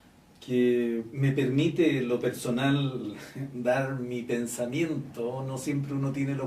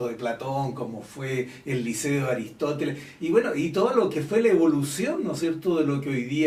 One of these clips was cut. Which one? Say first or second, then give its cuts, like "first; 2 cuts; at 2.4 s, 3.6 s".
first; 1 cut; at 2.0 s